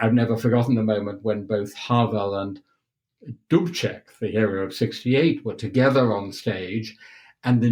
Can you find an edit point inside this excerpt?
no; 0 cuts

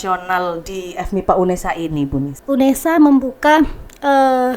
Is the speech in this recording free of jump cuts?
no; 1 cut; at 2.3 s

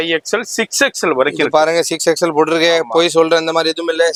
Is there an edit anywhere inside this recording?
no; 0 cuts

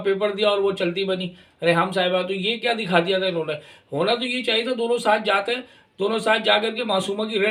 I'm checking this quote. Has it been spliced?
no; 0 cuts

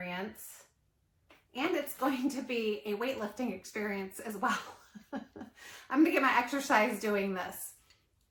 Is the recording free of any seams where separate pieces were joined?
yes; 0 cuts

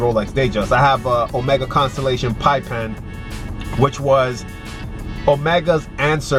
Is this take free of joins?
yes; 0 cuts

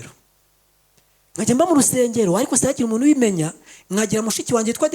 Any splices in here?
no; 0 cuts

